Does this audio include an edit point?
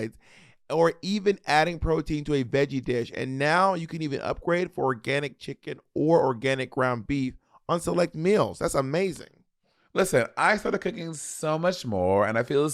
no; 0 cuts

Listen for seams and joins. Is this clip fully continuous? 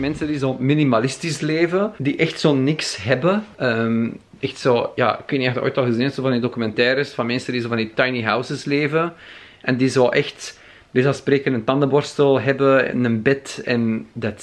no; 2 cuts; at 2.0 s, 3.5 s

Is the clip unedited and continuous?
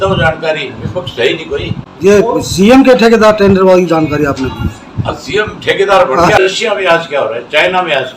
no; 2 cuts; at 1.8 s, 6.4 s

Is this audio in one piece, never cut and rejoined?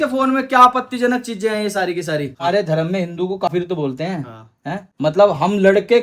no; 1 cut; at 2.3 s

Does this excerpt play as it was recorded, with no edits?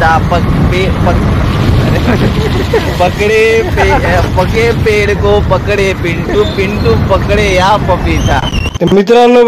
no; 1 cut; at 8.5 s

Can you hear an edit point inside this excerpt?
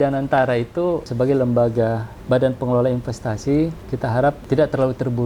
yes; 3 cuts; at 1.1 s, 2.1 s, 4.2 s

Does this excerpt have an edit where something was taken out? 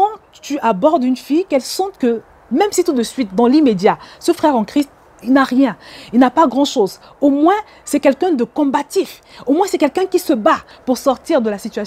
yes; 1 cut; at 10.7 s

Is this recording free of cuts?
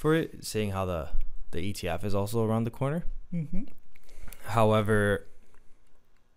yes; 0 cuts

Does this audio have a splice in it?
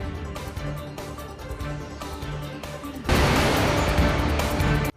yes; 1 cut; at 2.4 s

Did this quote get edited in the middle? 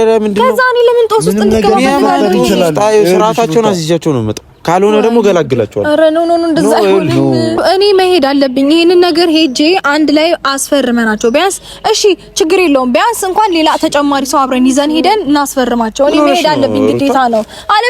yes; 1 cut; at 7.6 s

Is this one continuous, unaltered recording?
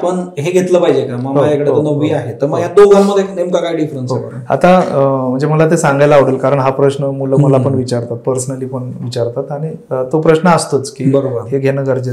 yes; 0 cuts

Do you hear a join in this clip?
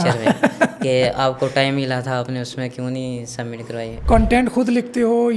yes; 1 cut; at 3.9 s

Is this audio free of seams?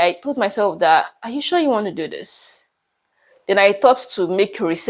yes; 0 cuts

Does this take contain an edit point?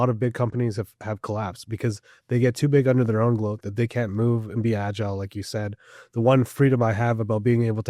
no; 0 cuts

